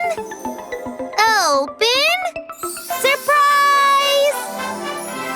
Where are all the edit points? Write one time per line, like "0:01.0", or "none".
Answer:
0:04.3